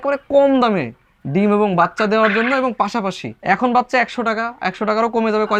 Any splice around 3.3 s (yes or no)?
yes